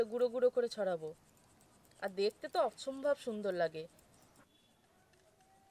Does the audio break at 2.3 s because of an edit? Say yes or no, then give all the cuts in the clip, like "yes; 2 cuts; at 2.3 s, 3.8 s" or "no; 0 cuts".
no; 1 cut; at 4.4 s